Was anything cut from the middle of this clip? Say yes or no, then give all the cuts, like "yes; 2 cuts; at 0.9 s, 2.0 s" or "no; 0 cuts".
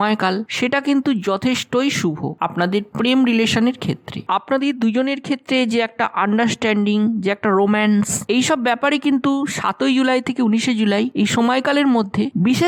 no; 0 cuts